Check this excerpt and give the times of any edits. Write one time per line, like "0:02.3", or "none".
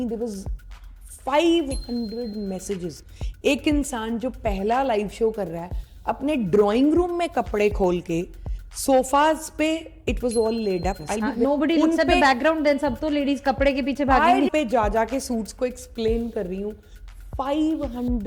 0:11.3
0:14.5